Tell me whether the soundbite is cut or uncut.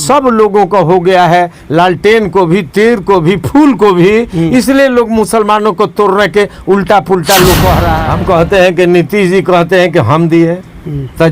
cut